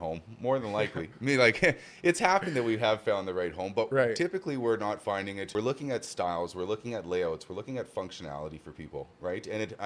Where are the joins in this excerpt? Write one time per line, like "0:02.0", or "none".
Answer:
0:05.4